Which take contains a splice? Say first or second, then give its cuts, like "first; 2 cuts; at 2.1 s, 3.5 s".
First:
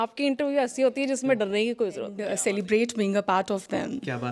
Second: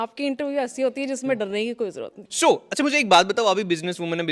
first; 1 cut; at 2.2 s